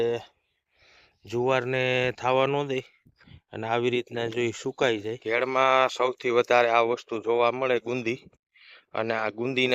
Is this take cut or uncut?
cut